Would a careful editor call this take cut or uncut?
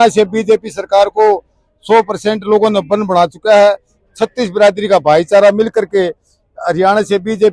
uncut